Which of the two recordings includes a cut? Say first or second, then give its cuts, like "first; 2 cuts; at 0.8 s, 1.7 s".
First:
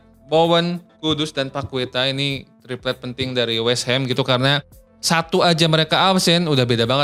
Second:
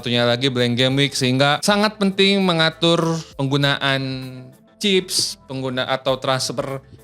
second; 2 cuts; at 1.6 s, 3.3 s